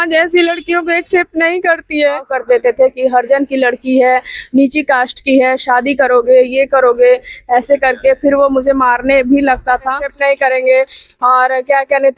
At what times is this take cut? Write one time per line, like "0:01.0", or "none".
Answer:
0:02.3
0:10.0